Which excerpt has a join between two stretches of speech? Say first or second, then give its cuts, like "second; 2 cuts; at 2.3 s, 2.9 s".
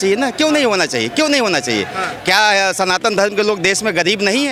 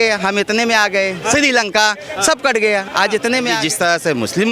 second; 1 cut; at 3.6 s